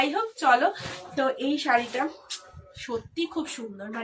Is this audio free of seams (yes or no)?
yes